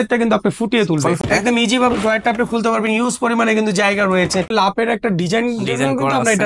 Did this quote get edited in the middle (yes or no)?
yes